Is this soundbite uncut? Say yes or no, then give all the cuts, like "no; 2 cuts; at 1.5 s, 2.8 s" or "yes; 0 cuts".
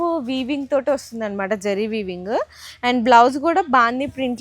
yes; 0 cuts